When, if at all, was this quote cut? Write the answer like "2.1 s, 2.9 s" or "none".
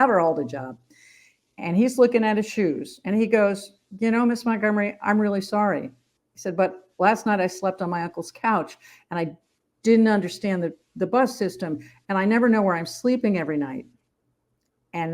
none